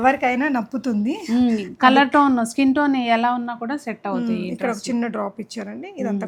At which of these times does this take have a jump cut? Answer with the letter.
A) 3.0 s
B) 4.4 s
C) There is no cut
C